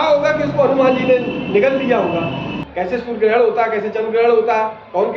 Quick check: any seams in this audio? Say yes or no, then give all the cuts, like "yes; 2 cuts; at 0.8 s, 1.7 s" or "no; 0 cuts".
yes; 1 cut; at 2.5 s